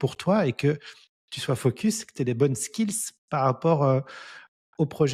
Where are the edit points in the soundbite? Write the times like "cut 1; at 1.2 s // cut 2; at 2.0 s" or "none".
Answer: none